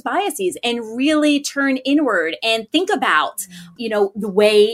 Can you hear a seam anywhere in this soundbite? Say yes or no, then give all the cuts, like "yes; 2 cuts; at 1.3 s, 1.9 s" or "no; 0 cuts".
yes; 1 cut; at 3.7 s